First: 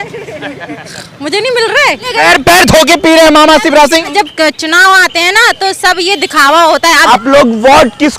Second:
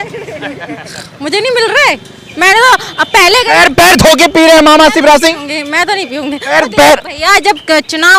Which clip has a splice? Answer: first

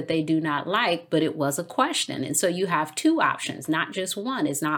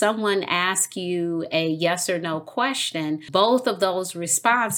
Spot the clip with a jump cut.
second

